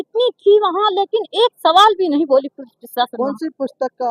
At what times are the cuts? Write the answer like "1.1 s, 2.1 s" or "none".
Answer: none